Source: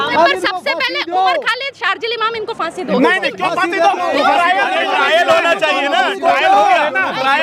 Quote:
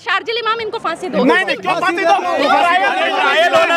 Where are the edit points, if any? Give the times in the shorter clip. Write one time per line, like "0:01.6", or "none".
none